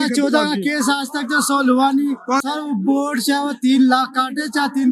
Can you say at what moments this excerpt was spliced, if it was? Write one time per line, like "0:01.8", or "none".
0:02.4